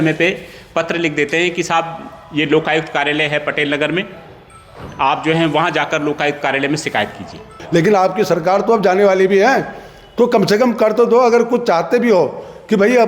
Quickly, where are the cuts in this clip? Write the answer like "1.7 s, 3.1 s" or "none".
7.6 s

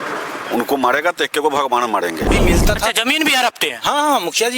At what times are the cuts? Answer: 2.3 s

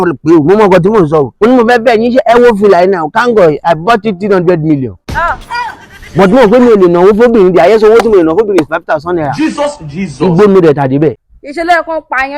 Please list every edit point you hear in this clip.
1.3 s

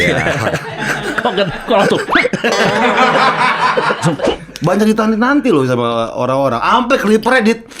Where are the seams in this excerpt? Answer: 4.3 s

